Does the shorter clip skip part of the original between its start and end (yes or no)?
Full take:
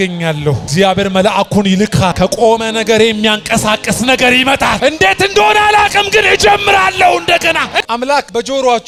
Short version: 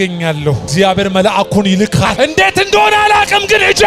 yes